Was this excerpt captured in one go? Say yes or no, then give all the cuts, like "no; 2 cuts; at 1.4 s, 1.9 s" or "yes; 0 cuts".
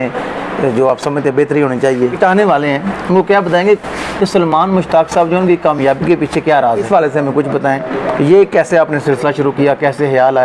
no; 2 cuts; at 2.1 s, 6.9 s